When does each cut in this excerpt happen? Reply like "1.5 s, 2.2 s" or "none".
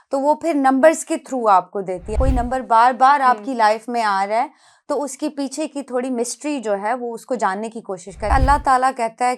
2.1 s, 8.2 s